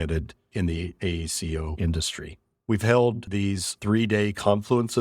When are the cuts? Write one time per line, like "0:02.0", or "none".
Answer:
0:01.1
0:03.3